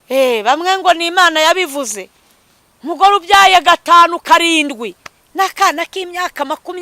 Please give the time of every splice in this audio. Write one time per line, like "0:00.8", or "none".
none